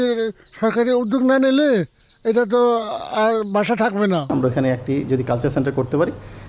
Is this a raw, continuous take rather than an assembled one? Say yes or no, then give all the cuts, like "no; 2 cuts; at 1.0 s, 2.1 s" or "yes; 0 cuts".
no; 1 cut; at 4.3 s